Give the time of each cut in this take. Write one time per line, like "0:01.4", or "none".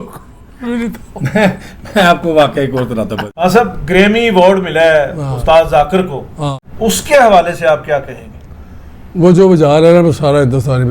0:03.2
0:06.6